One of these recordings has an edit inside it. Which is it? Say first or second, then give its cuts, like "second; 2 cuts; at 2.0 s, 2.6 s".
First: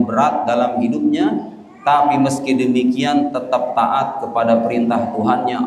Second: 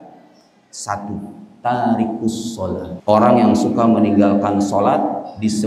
second; 2 cuts; at 1.4 s, 2.9 s